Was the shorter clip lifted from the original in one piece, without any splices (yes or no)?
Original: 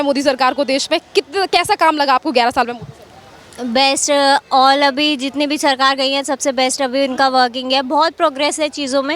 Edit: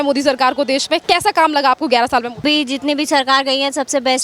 no